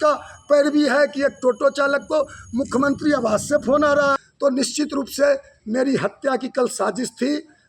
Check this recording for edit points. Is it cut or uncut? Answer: cut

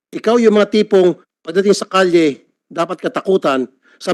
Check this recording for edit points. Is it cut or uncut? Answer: uncut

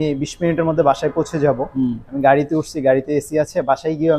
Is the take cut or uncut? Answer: uncut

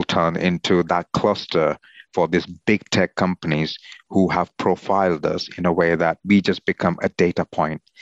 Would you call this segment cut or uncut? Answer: cut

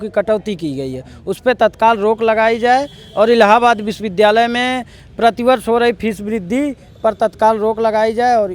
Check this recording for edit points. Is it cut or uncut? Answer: uncut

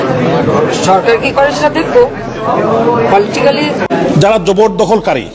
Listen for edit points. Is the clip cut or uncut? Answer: cut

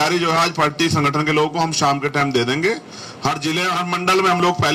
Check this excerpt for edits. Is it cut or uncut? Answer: uncut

